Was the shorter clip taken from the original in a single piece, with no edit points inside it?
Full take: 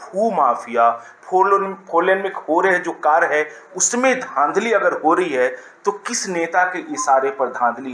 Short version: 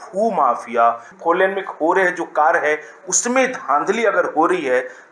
no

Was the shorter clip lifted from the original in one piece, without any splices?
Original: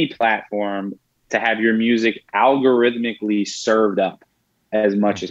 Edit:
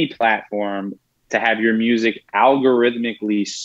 yes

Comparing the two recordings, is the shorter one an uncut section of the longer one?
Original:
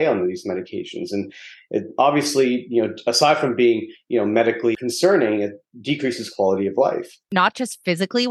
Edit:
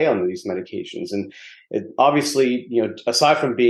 yes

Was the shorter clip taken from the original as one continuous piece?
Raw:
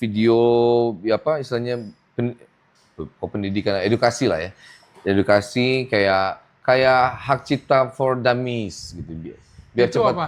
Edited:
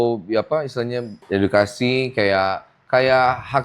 no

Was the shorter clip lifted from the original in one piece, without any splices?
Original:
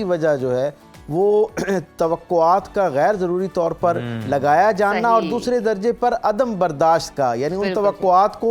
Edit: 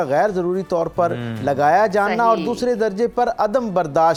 yes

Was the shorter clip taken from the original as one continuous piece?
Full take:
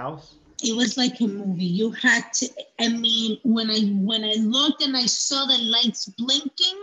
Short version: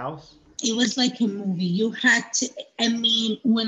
yes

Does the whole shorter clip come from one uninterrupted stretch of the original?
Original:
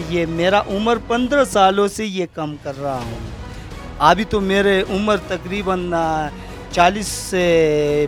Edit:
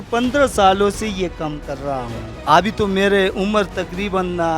no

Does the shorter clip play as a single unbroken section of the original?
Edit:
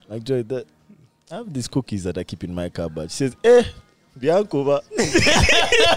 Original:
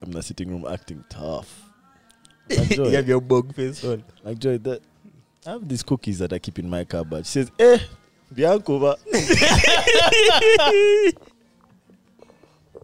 yes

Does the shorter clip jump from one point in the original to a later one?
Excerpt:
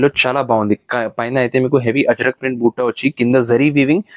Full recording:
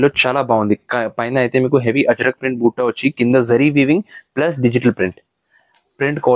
no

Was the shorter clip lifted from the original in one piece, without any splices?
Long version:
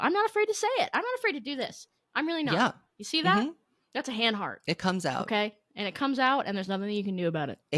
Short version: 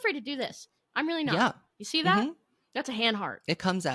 yes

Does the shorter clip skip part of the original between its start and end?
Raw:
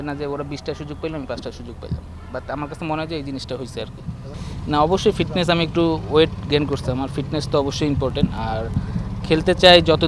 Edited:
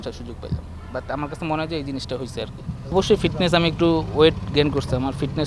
yes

